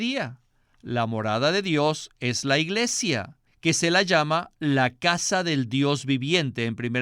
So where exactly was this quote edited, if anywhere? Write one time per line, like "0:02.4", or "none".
none